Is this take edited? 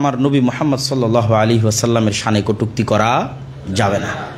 no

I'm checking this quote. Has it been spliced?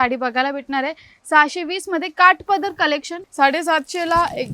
yes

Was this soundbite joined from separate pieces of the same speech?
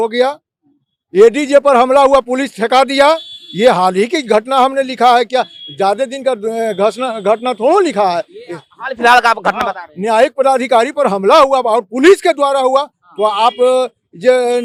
no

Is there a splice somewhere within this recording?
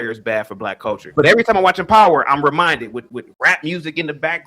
yes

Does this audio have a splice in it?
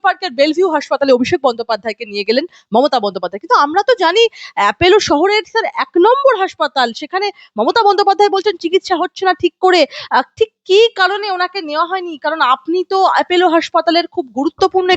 no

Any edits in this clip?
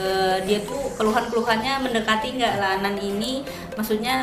yes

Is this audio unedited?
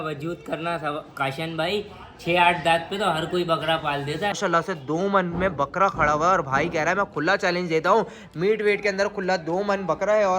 no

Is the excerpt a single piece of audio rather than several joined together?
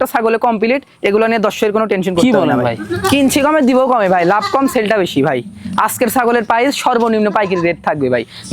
no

